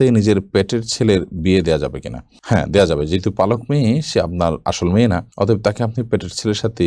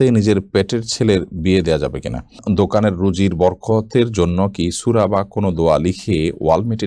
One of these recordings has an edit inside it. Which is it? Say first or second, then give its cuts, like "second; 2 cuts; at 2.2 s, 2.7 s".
second; 1 cut; at 2.4 s